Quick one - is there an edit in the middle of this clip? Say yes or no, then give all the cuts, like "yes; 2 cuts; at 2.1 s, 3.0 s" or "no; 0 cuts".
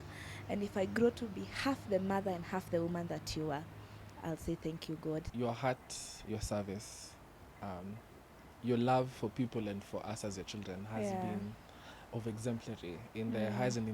yes; 1 cut; at 5.3 s